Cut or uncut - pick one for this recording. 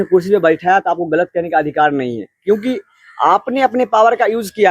uncut